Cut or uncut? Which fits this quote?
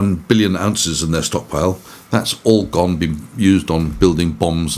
uncut